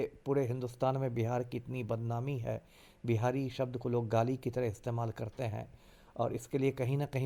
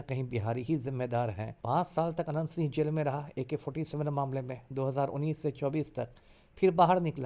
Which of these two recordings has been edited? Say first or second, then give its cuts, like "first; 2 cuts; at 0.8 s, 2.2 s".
second; 1 cut; at 1.5 s